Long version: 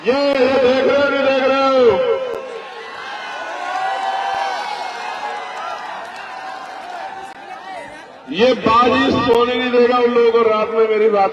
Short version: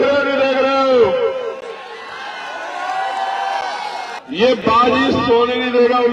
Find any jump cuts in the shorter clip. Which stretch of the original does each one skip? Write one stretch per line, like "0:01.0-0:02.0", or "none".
0:05.0-0:08.1